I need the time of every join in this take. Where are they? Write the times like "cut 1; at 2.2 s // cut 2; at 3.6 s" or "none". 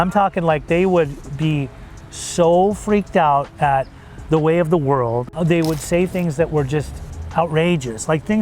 cut 1; at 5.3 s